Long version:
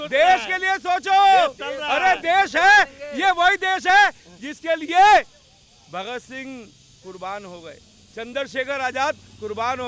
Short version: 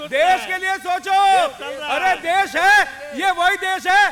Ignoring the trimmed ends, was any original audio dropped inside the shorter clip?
no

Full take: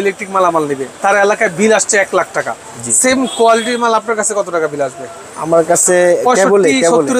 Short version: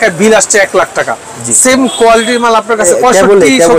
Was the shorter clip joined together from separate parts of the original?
yes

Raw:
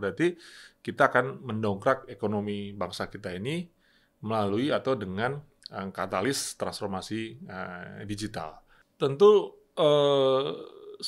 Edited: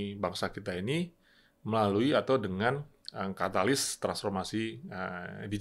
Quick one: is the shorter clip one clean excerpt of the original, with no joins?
yes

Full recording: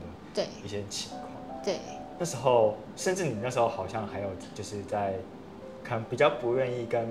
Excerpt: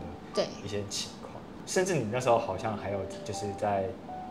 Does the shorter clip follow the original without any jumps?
no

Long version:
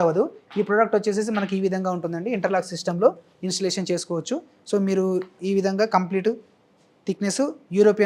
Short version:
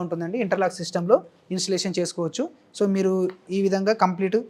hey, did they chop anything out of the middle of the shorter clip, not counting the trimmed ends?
no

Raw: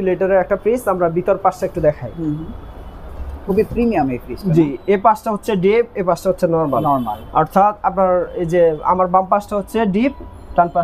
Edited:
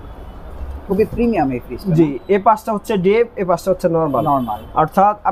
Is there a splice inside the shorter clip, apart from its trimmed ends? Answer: no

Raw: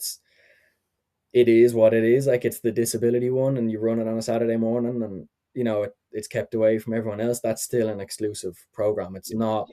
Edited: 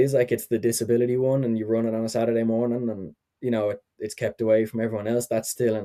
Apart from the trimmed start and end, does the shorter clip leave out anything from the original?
no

